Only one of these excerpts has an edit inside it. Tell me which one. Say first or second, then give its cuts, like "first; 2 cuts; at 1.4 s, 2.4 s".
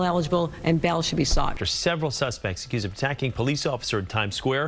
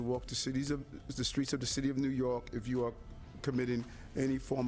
first; 1 cut; at 1.6 s